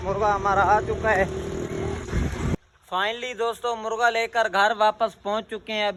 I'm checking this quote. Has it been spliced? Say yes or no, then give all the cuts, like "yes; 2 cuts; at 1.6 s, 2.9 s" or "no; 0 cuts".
no; 0 cuts